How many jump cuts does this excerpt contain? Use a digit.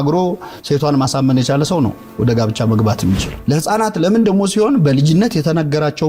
1